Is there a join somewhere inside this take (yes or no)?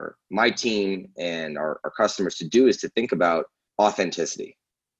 yes